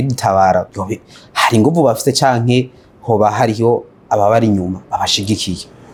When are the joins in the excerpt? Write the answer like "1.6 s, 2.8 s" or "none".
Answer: none